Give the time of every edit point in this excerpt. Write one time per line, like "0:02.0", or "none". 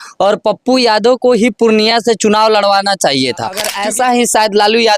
0:03.7

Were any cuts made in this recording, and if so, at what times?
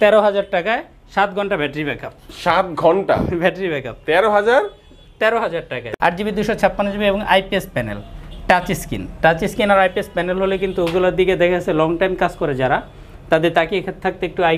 0:05.8

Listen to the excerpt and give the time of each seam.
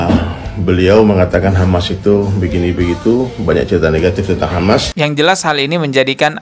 0:04.9

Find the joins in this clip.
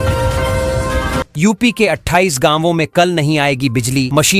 0:01.3

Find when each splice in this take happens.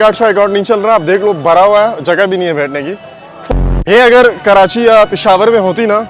0:03.5

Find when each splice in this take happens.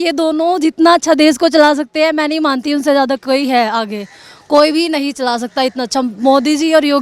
none

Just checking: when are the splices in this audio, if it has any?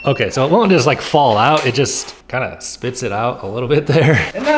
none

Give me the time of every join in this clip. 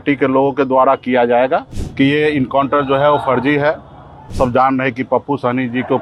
0:01.8
0:04.3

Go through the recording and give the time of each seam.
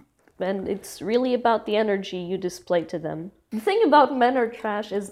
0:03.3

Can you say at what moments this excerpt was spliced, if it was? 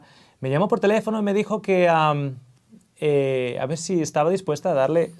0:01.2

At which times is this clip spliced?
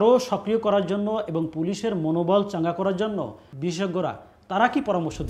0:03.4

